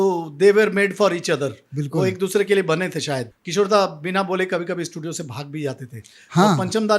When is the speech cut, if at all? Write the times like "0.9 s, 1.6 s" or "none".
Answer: 3.3 s